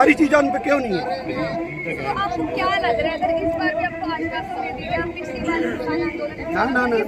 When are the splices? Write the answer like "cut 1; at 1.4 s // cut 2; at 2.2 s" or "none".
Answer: none